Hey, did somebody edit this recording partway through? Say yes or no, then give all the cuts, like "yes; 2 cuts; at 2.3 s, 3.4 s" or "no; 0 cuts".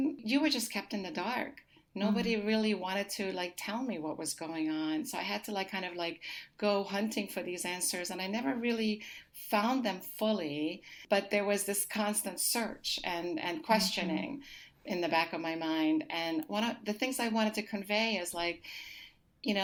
no; 0 cuts